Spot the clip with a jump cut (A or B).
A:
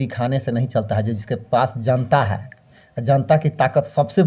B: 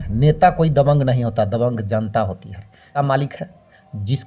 B